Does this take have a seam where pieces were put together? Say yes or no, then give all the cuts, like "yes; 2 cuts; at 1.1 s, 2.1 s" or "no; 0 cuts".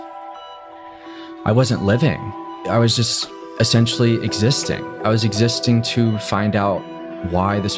no; 0 cuts